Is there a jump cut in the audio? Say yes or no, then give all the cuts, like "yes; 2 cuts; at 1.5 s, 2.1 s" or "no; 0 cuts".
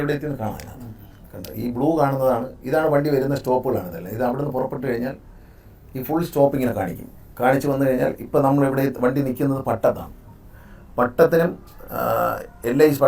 no; 0 cuts